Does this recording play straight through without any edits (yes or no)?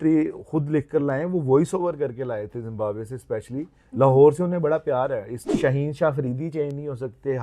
no